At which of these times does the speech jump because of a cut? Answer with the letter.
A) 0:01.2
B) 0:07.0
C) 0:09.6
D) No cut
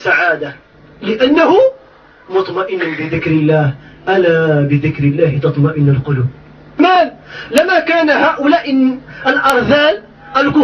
B